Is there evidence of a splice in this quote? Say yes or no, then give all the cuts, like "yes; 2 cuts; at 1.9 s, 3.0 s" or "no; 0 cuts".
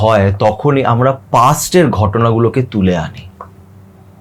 no; 0 cuts